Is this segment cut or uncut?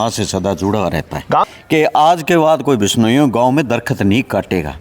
cut